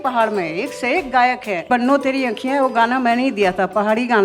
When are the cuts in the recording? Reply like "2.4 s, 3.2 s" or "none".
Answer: 1.6 s